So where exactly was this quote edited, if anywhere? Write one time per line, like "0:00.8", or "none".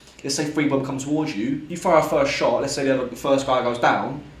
0:01.8